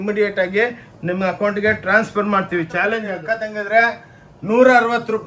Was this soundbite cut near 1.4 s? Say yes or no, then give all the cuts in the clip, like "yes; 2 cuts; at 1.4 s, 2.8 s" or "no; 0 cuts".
no; 1 cut; at 3.1 s